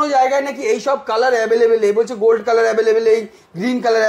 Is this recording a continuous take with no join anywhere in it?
yes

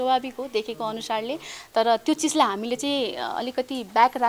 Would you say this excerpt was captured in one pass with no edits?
yes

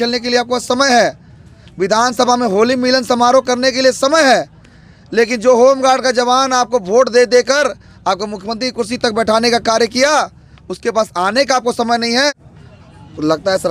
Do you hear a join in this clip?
yes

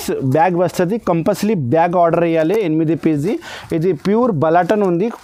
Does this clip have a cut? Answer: no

